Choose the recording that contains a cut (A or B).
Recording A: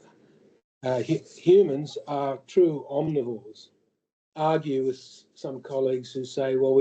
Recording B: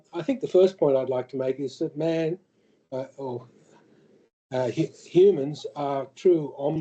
A